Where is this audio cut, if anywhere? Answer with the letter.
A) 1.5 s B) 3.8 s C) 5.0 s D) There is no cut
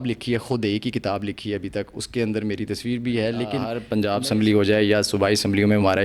B